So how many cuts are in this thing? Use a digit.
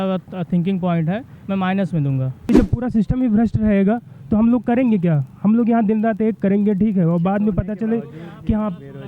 1